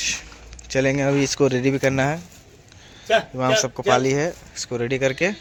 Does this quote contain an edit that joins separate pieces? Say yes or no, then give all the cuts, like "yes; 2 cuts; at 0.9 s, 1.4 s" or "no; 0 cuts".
no; 0 cuts